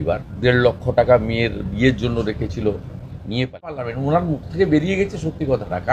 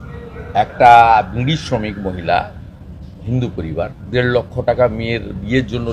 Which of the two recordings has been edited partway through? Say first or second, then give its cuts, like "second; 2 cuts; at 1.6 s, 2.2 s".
first; 1 cut; at 3.9 s